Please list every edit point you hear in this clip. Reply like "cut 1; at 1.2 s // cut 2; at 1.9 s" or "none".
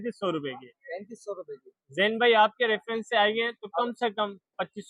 none